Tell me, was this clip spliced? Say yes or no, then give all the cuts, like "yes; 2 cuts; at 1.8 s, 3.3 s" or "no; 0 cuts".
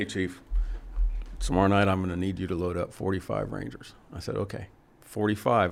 no; 0 cuts